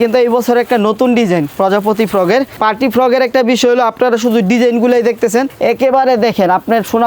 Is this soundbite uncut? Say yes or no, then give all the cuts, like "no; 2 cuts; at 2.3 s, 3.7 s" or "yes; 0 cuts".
no; 2 cuts; at 2.5 s, 5.5 s